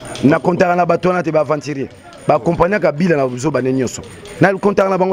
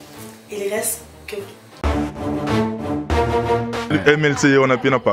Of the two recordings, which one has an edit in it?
second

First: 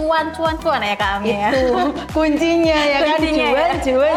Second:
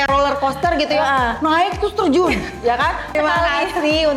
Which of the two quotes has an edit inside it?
second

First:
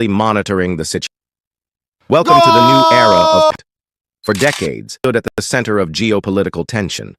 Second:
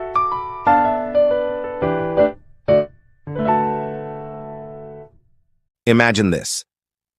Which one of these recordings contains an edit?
first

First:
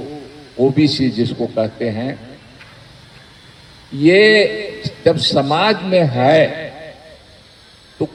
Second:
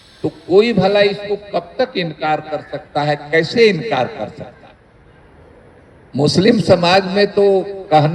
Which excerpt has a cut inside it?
second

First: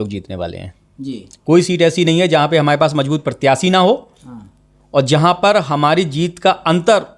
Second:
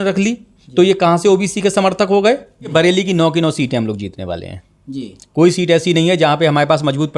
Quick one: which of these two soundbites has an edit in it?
second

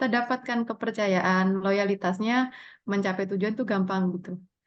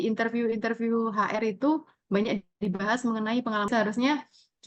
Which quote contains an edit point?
second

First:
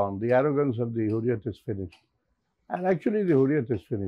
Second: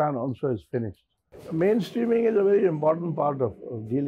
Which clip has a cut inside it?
second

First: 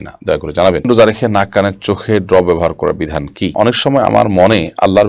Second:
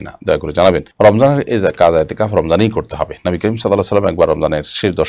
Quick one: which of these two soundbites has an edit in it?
first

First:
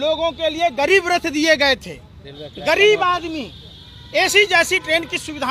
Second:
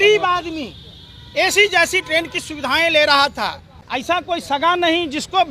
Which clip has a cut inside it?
second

